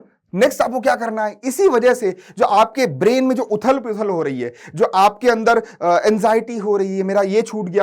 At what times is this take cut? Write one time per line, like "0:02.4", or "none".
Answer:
none